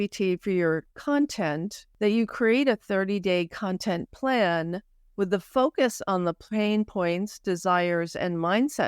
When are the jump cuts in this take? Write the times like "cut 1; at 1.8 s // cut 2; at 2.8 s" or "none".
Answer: cut 1; at 0.9 s // cut 2; at 1.8 s